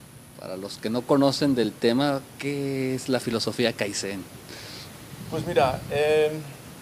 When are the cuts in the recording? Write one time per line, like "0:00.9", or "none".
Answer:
none